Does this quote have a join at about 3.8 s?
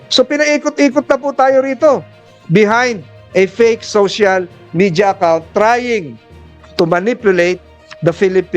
no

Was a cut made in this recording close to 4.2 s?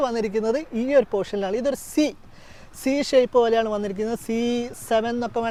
no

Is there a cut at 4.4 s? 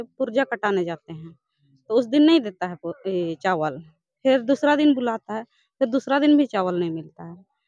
no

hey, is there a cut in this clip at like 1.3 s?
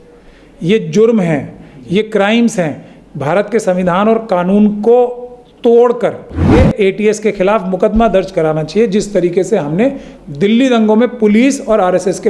no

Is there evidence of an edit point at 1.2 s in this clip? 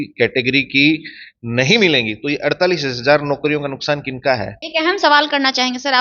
no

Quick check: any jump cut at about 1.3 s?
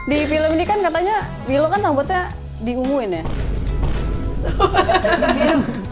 yes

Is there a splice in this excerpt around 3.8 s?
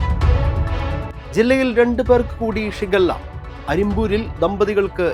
no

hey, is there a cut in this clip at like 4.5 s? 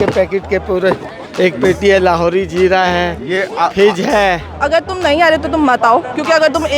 yes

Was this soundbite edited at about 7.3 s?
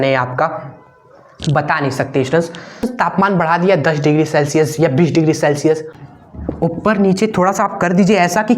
no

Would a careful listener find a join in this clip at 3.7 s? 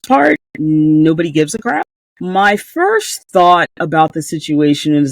no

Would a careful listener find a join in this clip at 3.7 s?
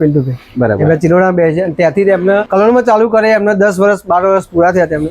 no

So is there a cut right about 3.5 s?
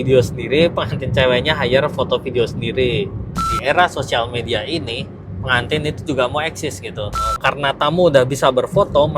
yes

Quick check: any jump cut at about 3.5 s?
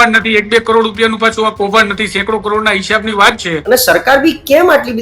yes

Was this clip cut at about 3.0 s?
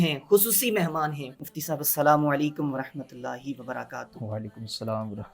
no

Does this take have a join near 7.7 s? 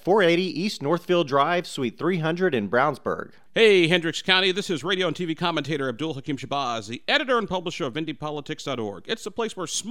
no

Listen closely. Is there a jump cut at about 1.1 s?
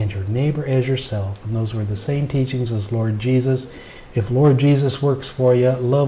no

